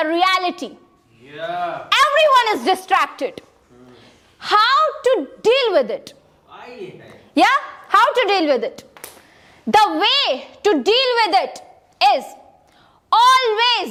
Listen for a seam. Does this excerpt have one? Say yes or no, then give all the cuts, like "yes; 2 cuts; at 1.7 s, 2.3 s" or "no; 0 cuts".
no; 0 cuts